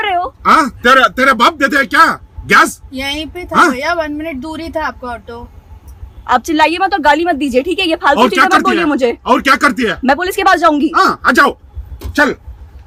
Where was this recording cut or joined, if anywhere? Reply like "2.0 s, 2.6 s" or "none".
none